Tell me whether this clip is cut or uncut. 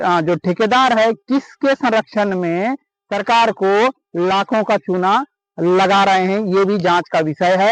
uncut